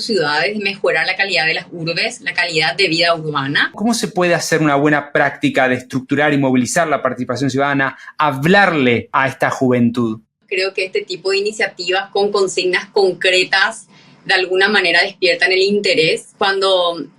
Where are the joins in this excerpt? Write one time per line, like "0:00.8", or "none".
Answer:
0:03.8
0:09.1
0:10.4
0:16.3